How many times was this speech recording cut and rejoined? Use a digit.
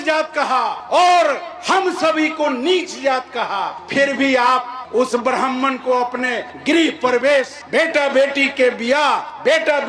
0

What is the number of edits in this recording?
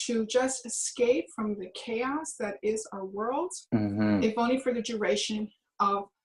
0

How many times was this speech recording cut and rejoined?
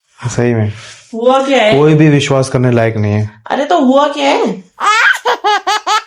1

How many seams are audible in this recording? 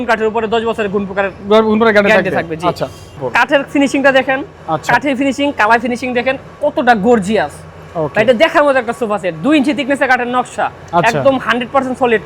1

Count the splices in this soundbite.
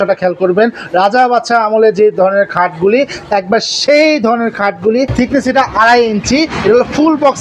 1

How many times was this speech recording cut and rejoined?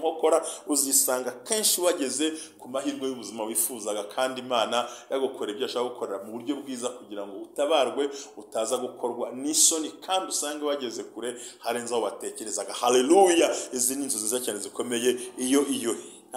0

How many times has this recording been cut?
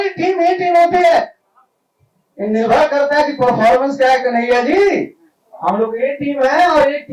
0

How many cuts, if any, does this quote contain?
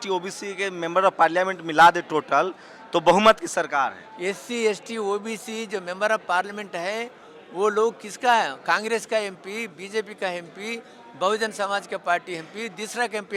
0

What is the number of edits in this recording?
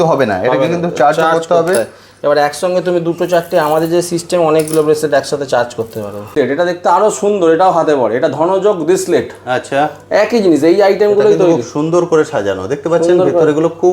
1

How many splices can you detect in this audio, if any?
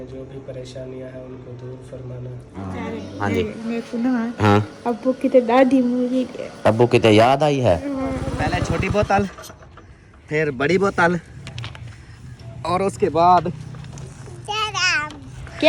2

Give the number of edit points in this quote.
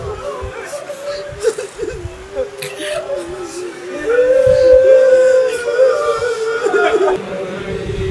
1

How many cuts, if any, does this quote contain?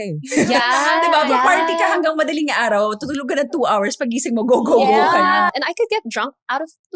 1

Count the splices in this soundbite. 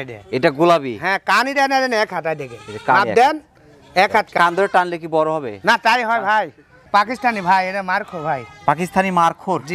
2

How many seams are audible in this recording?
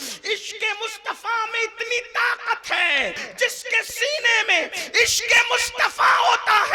1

